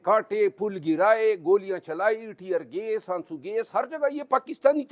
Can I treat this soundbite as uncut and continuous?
yes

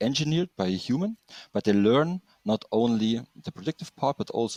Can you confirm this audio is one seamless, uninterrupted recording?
yes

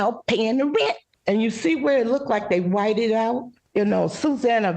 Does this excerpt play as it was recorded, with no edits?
no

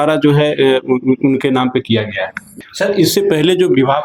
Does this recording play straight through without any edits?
no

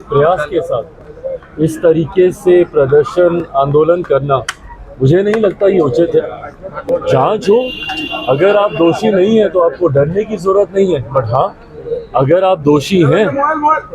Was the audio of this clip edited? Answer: no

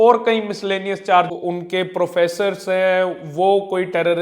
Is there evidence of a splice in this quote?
yes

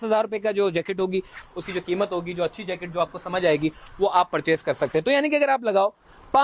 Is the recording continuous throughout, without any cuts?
yes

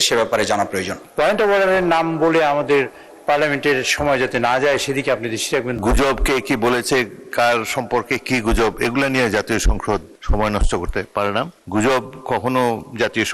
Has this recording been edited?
yes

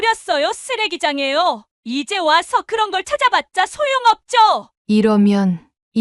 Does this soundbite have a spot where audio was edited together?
yes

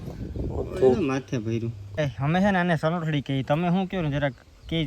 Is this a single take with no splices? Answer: no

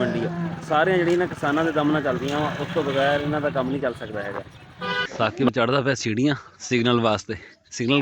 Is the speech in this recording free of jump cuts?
no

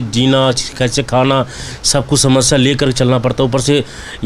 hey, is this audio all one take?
yes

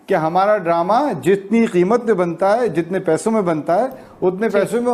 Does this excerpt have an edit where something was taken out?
no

